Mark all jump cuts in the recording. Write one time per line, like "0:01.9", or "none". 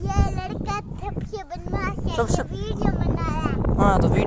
none